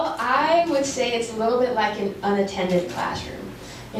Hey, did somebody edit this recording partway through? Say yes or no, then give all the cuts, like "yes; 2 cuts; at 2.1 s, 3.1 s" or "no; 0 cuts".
no; 0 cuts